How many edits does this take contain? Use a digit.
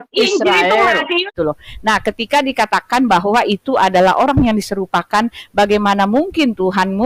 1